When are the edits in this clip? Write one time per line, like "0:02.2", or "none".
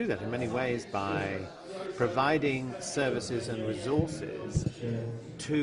0:02.4